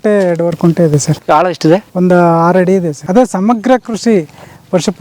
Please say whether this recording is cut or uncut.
cut